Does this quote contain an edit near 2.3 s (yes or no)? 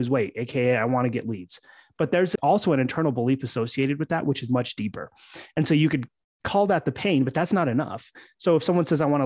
yes